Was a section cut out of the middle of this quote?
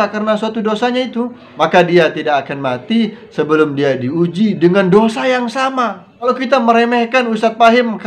yes; 2 cuts; at 1.4 s, 6.3 s

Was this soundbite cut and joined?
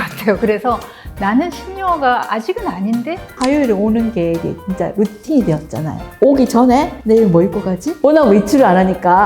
yes; 2 cuts; at 3.2 s, 7.8 s

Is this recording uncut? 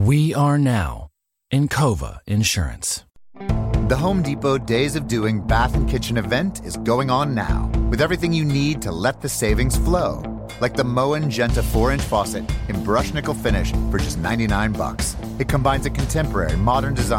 no; 1 cut; at 3.3 s

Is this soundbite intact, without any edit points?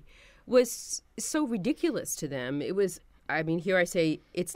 yes; 0 cuts

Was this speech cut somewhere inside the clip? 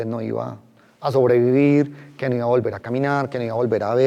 no; 0 cuts

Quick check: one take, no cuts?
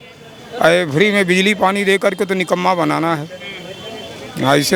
yes; 0 cuts

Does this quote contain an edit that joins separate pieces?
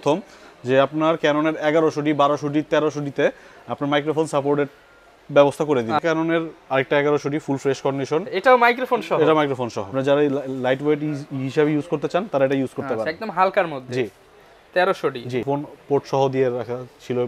yes; 3 cuts; at 6.0 s, 9.8 s, 15.4 s

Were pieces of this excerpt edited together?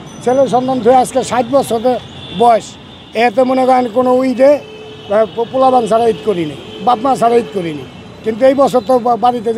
no; 0 cuts

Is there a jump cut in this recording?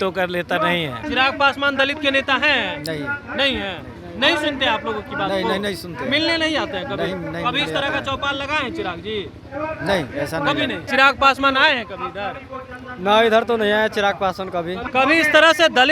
yes; 3 cuts; at 1.0 s, 10.9 s, 14.8 s

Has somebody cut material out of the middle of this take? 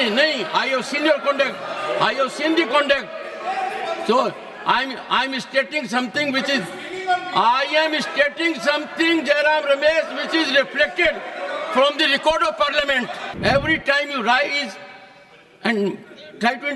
yes; 1 cut; at 13.2 s

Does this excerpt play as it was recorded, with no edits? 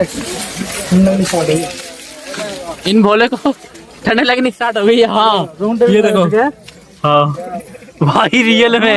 yes; 0 cuts

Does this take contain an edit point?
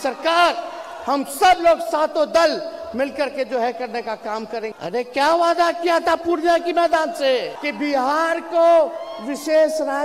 yes; 2 cuts; at 4.7 s, 7.6 s

